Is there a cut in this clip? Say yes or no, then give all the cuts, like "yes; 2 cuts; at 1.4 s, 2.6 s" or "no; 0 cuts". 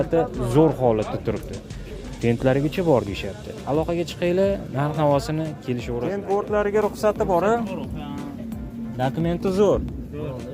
yes; 1 cut; at 5.9 s